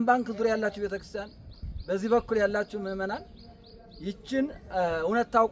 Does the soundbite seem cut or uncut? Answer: uncut